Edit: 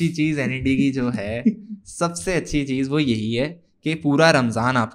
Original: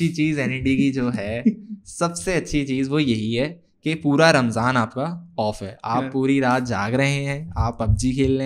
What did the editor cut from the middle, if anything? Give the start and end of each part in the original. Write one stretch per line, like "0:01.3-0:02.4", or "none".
none